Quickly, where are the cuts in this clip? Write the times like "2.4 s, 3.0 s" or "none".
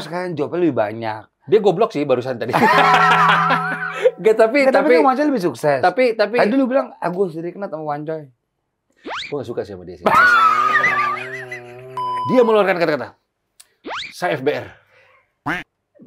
12.1 s